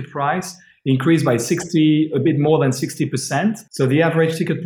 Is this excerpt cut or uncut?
cut